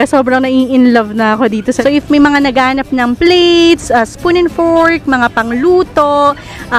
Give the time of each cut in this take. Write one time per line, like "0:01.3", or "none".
0:01.8